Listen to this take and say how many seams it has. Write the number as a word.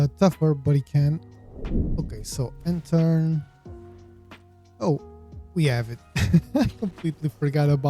one